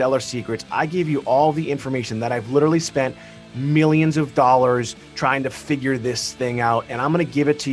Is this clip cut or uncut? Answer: uncut